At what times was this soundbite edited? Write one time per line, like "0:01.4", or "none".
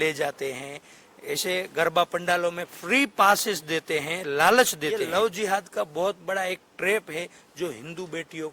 0:05.0